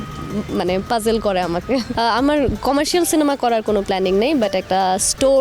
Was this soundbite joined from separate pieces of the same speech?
yes; 1 cut; at 1.9 s

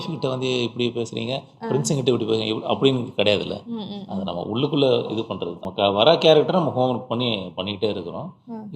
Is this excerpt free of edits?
no; 1 cut; at 5.6 s

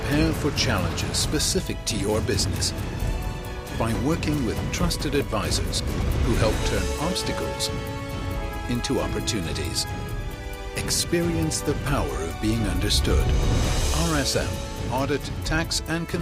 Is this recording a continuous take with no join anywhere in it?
yes; 0 cuts

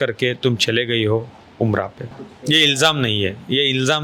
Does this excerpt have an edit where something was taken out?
yes; 1 cut; at 2.2 s

